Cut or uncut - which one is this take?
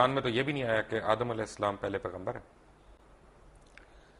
uncut